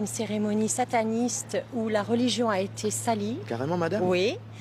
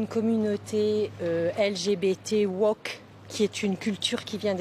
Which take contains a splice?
first; 1 cut; at 3.6 s

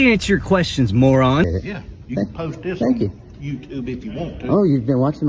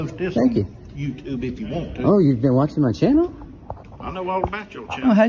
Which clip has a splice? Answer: first; 1 cut; at 1.4 s

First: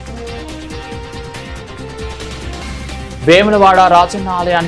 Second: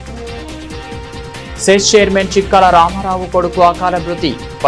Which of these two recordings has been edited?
second; 1 cut; at 1.0 s

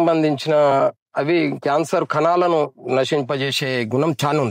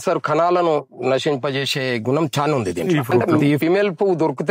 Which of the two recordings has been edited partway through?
second; 1 cut; at 3.6 s

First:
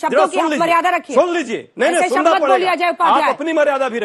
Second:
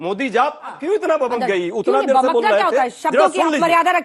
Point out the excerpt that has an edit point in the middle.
second; 2 cuts; at 0.8 s, 1.7 s

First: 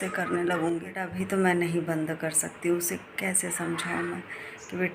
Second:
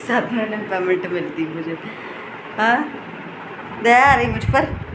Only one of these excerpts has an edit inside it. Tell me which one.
first; 1 cut; at 1.1 s

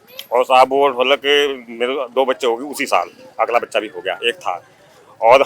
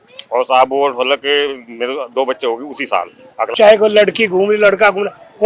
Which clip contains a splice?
second; 1 cut; at 3.5 s

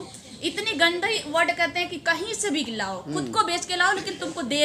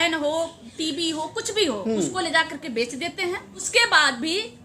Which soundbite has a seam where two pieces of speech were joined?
second; 1 cut; at 3.7 s

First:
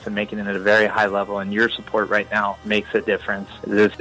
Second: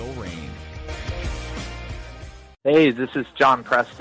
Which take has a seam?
second; 1 cut; at 2.4 s

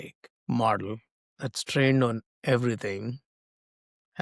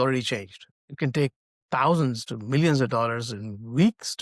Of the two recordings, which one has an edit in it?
second; 2 cuts; at 0.9 s, 1.5 s

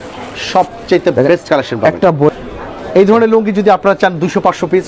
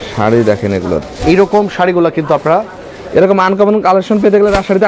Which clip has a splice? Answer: first; 1 cut; at 2.3 s

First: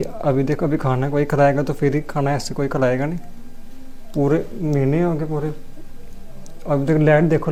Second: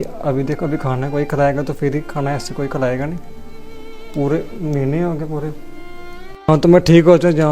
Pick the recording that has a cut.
second; 1 cut; at 6.5 s

